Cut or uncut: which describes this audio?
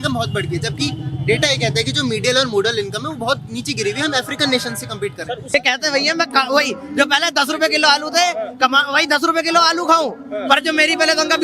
cut